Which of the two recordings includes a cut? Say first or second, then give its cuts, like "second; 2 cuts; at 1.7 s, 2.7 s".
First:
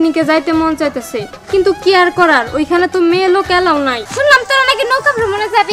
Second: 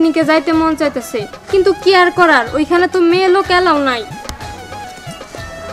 first; 1 cut; at 4.1 s